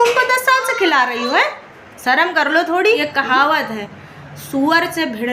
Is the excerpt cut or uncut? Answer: cut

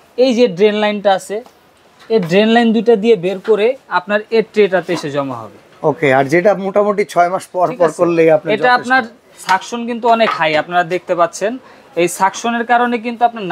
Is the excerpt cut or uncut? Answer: uncut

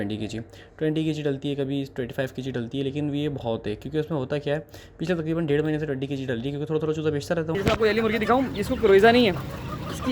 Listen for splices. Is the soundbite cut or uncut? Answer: cut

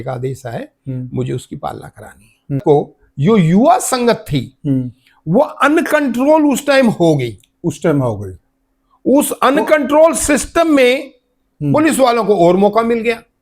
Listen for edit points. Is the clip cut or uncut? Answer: cut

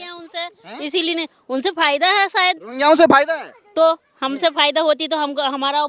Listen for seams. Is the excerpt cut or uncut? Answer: uncut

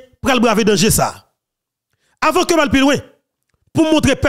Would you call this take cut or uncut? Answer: uncut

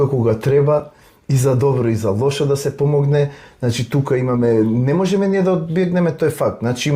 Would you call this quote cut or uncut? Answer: uncut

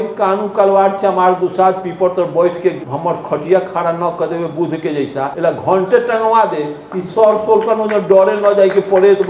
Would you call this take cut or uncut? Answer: cut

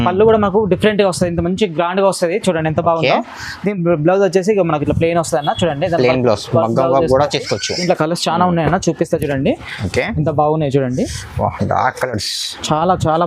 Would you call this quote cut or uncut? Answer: cut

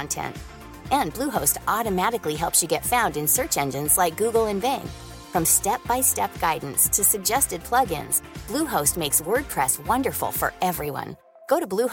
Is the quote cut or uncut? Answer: uncut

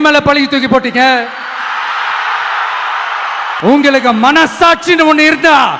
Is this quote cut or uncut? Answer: cut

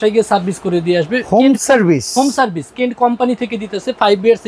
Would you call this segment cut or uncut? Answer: uncut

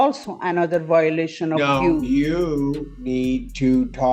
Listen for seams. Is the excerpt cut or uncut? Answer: uncut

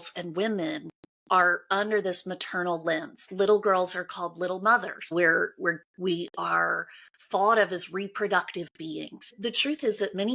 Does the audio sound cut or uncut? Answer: cut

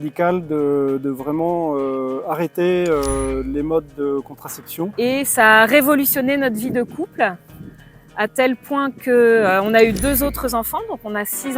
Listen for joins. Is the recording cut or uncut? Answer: cut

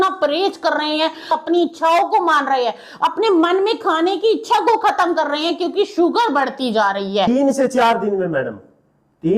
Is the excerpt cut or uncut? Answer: cut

